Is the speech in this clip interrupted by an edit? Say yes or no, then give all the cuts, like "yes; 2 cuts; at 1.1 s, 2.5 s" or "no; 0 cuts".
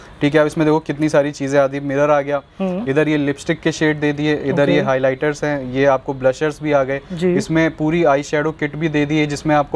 no; 0 cuts